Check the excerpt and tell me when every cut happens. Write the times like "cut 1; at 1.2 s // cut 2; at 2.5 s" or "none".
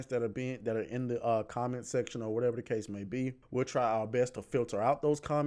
cut 1; at 3.4 s